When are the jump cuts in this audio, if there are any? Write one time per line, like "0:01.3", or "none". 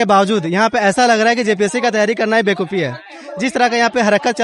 none